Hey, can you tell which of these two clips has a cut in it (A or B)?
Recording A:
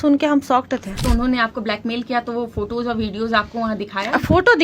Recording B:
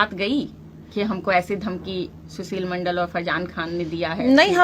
A